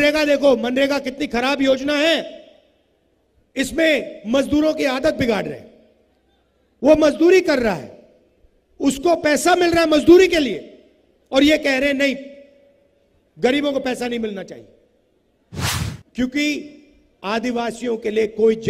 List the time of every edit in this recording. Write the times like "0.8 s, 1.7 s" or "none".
15.7 s